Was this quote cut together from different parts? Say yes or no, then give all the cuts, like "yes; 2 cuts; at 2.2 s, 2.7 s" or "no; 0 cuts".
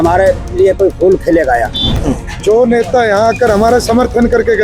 yes; 1 cut; at 1.9 s